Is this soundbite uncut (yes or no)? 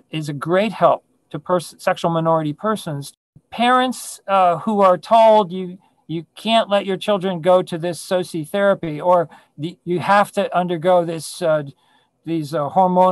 no